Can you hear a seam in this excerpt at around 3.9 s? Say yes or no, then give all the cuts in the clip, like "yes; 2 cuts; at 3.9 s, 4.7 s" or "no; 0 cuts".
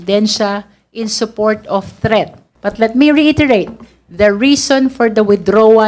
no; 1 cut; at 2.4 s